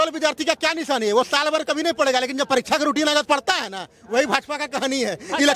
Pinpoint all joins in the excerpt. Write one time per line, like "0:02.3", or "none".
none